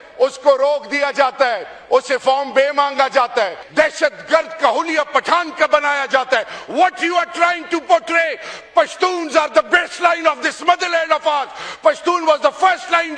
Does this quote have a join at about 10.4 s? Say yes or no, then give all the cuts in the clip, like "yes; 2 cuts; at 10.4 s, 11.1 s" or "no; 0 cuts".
no; 1 cut; at 3.6 s